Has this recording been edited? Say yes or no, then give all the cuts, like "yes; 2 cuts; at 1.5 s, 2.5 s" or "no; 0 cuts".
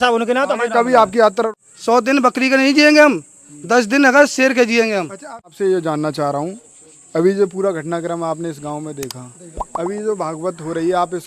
yes; 2 cuts; at 1.5 s, 5.5 s